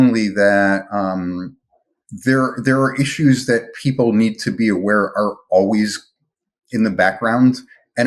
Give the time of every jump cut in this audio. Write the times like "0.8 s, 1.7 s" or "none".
1.6 s